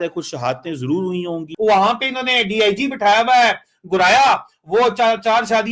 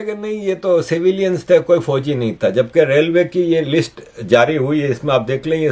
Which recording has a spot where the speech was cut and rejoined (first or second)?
first